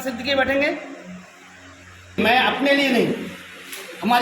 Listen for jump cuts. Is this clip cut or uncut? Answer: cut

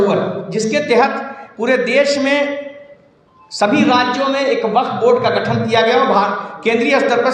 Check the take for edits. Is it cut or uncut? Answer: uncut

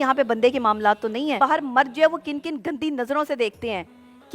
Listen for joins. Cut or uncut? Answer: cut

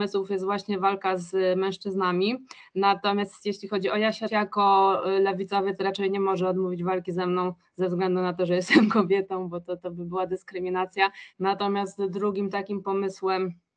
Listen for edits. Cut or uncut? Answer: cut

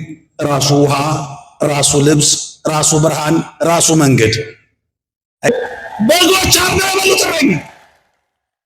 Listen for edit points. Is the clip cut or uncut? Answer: cut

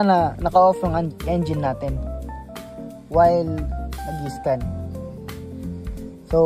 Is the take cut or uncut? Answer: uncut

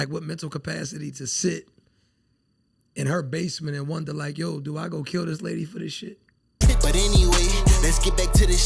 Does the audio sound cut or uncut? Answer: cut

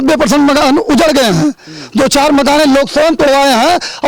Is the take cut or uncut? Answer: uncut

